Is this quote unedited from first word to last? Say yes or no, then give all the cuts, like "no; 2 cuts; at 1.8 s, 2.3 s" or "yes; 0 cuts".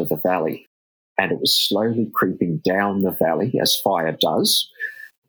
yes; 0 cuts